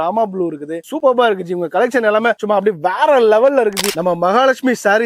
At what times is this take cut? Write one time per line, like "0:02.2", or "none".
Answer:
0:03.8